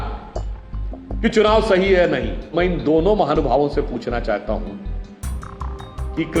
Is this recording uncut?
no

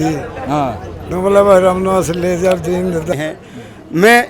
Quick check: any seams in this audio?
yes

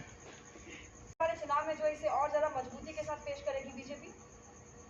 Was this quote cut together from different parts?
yes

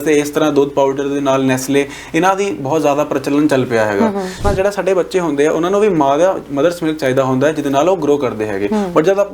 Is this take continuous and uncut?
no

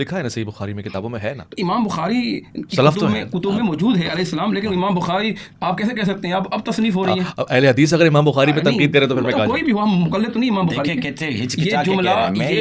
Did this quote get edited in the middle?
no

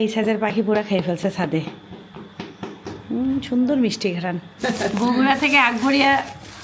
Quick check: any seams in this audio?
no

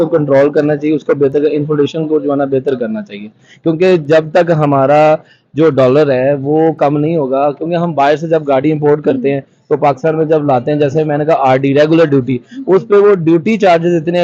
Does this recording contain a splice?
no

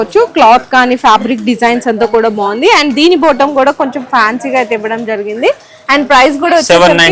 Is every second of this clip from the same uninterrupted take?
yes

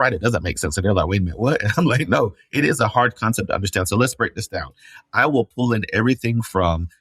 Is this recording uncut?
yes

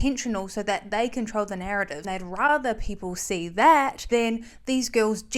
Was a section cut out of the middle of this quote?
yes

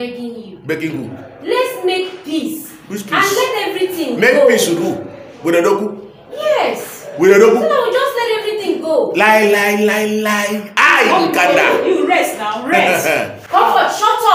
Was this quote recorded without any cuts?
yes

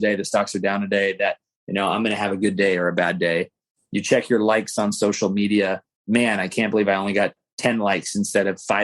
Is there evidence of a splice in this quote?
yes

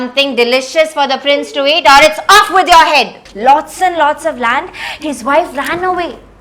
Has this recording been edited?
yes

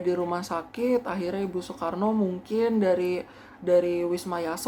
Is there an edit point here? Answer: no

